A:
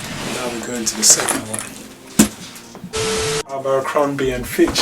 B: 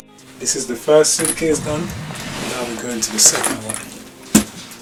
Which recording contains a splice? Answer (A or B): A